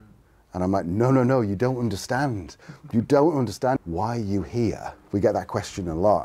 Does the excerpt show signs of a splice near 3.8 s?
yes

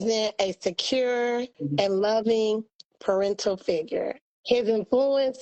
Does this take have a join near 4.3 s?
yes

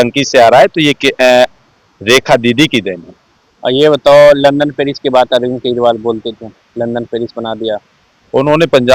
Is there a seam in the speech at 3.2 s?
no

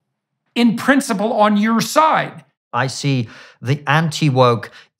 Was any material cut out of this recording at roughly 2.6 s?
yes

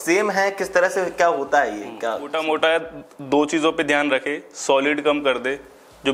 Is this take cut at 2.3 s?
yes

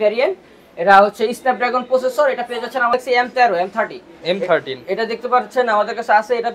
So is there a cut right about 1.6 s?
no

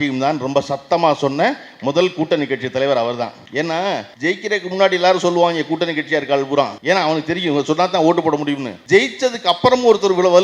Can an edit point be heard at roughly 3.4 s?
yes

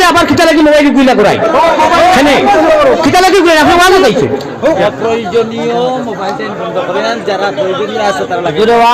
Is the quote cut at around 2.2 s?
no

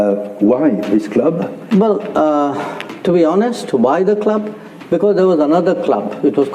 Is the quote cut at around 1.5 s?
yes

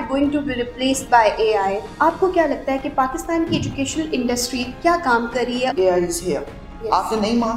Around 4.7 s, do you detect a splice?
yes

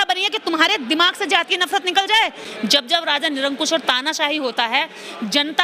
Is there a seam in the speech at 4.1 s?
no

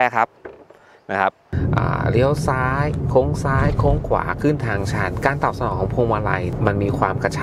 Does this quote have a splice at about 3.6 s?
no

